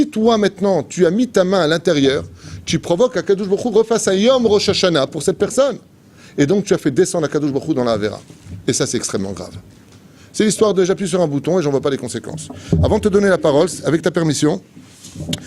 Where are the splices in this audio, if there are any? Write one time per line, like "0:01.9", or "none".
none